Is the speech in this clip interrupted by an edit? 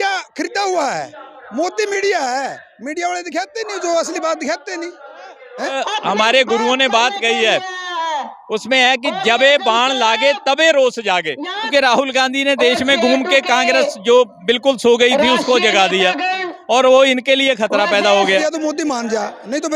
yes; 3 cuts; at 5.8 s, 11.7 s, 18.4 s

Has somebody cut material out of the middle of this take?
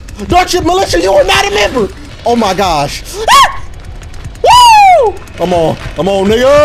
yes; 1 cut; at 2.1 s

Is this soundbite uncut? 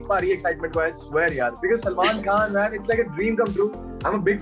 yes; 0 cuts

